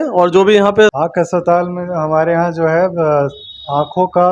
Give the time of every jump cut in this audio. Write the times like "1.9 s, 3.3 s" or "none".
1.0 s